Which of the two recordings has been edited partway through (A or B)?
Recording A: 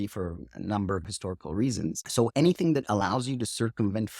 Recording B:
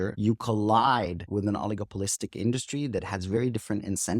A